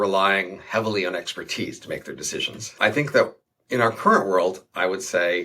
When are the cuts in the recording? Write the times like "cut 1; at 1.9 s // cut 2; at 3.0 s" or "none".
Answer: cut 1; at 2.7 s